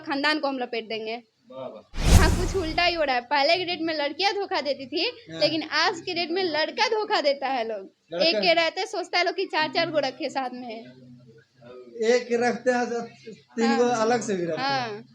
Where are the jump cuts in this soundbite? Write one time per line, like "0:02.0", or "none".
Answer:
0:02.2